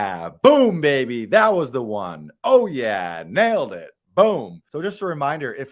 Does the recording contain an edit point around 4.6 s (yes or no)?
yes